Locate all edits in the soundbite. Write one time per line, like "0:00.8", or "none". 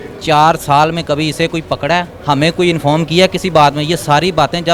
0:02.1